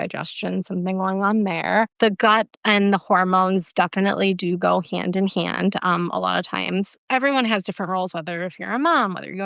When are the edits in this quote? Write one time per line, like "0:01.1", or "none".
0:01.9
0:07.0